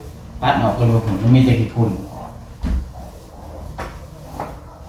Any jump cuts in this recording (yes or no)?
no